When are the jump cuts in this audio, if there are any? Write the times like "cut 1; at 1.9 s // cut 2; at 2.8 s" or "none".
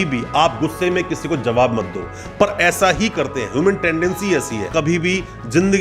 cut 1; at 4.7 s